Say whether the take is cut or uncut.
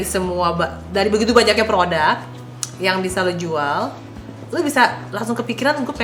uncut